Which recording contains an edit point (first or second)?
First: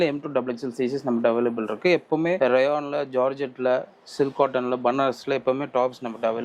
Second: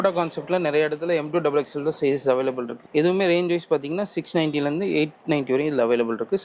second